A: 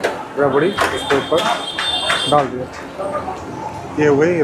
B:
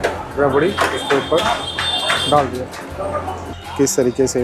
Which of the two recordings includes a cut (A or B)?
B